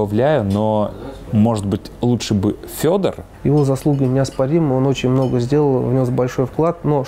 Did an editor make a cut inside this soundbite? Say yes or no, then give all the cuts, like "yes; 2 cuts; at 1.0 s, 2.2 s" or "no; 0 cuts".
yes; 1 cut; at 3.3 s